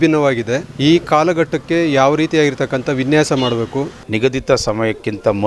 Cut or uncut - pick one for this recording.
cut